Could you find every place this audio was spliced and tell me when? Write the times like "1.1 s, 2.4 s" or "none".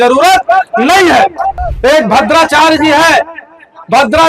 1.6 s